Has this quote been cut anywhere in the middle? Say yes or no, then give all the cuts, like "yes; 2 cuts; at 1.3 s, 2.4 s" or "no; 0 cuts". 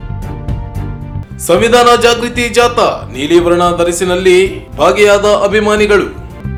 no; 0 cuts